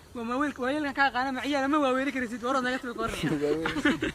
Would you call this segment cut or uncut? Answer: uncut